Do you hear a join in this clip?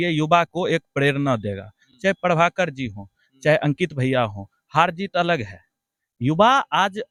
no; 0 cuts

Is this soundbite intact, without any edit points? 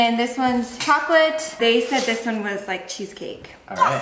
yes; 0 cuts

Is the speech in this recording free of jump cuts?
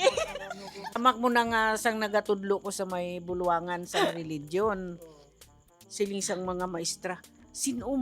no; 1 cut; at 1.0 s

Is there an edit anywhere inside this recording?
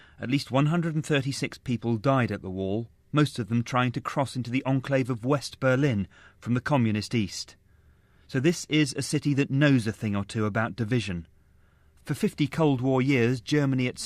yes; 1 cut; at 4.8 s

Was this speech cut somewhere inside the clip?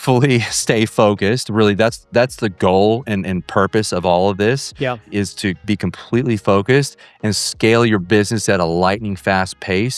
yes; 1 cut; at 5.3 s

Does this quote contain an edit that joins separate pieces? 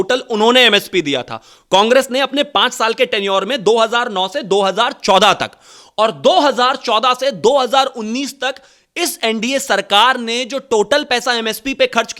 no; 0 cuts

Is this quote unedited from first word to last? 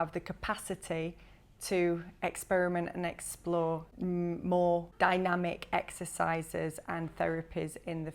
no; 2 cuts; at 3.9 s, 4.9 s

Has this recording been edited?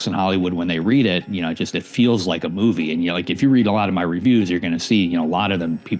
no; 0 cuts

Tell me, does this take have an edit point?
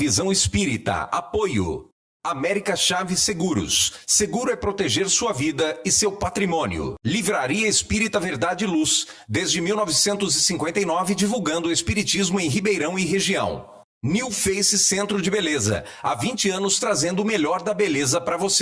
no; 0 cuts

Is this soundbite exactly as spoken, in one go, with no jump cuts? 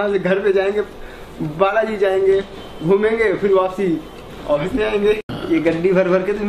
no; 1 cut; at 5.3 s

